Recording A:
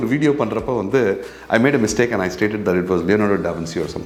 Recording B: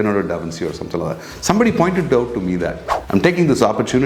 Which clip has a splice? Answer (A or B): B